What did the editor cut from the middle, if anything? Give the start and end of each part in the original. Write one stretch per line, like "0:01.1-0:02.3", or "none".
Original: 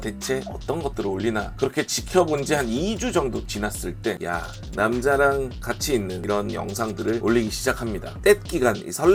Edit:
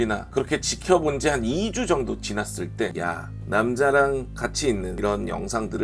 none